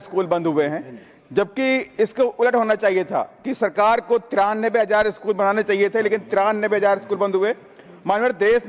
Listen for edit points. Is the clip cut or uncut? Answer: uncut